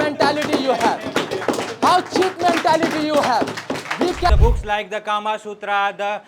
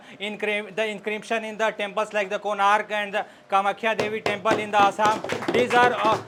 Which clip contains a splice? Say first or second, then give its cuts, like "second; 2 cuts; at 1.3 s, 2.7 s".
first; 1 cut; at 4.3 s